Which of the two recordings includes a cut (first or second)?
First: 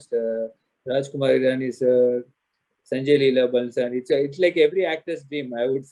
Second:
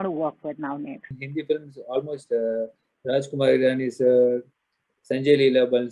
second